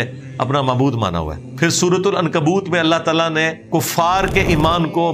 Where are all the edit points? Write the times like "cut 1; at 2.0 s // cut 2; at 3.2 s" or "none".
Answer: cut 1; at 1.4 s // cut 2; at 3.6 s